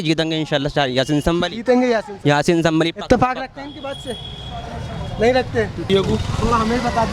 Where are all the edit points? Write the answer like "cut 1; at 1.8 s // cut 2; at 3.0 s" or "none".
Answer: none